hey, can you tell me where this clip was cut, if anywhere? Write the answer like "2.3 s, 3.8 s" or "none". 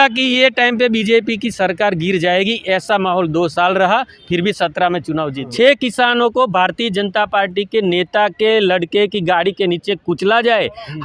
5.4 s